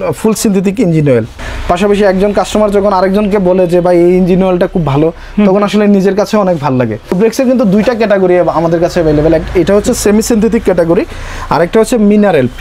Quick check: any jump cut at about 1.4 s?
yes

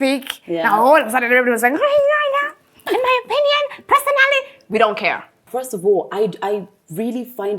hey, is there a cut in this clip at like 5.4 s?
yes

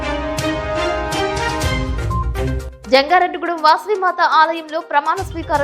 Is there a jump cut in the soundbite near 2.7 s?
yes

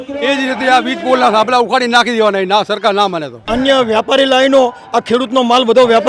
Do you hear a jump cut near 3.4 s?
yes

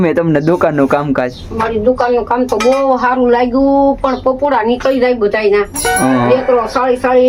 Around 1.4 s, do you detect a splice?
no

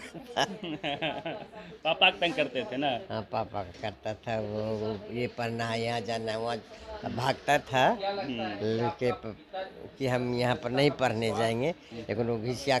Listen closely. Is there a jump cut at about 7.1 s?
no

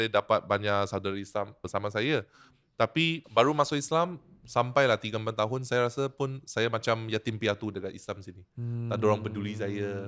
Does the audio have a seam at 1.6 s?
yes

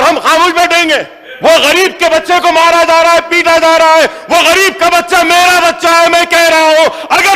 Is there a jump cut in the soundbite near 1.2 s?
yes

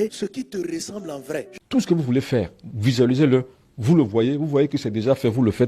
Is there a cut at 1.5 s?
yes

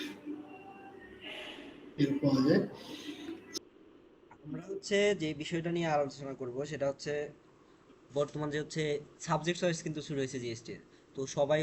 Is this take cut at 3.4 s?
yes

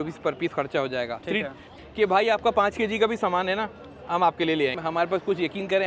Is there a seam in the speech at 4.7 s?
yes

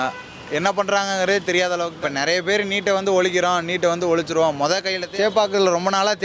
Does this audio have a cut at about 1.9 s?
yes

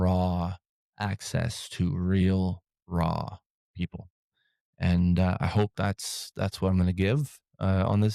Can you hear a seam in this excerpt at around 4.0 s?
no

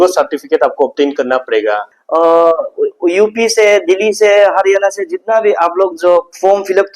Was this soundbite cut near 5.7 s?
no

